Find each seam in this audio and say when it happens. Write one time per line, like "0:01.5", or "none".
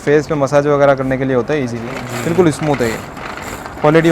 0:01.9